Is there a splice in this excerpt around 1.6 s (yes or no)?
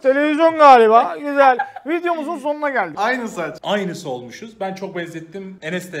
no